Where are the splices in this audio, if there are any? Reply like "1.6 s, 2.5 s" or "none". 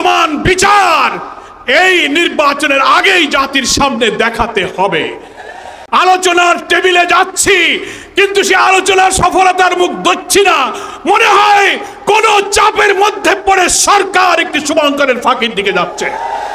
5.7 s

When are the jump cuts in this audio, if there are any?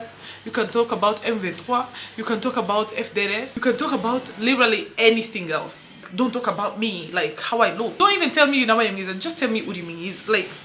3.5 s, 6.0 s, 7.9 s

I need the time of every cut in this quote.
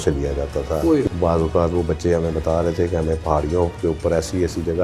1.0 s

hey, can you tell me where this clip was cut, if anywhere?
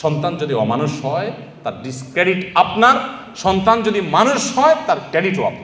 none

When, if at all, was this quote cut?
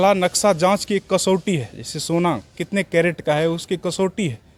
none

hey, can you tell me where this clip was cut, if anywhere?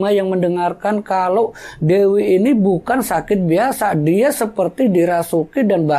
none

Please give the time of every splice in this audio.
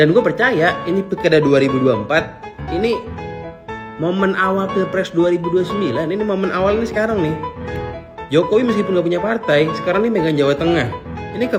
none

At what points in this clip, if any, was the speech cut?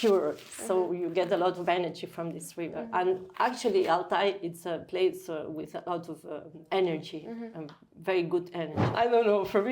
6.6 s, 8.8 s

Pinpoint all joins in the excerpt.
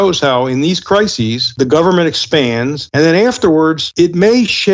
1.5 s, 2.8 s, 3.8 s

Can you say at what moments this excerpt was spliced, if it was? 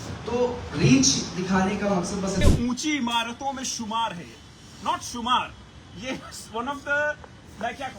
2.5 s

